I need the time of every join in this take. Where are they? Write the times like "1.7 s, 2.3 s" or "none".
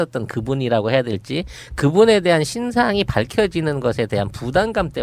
2.1 s